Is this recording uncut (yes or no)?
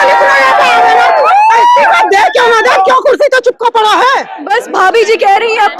no